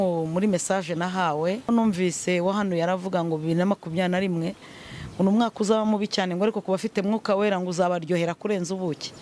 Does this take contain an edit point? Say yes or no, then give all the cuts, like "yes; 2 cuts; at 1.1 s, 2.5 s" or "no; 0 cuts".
yes; 1 cut; at 1.7 s